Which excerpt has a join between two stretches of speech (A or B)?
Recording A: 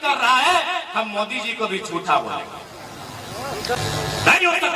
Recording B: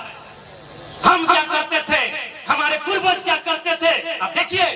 A